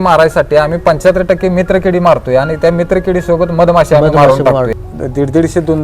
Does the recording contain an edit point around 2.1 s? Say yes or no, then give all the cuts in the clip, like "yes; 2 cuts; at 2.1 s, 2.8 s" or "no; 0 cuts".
no; 1 cut; at 4.7 s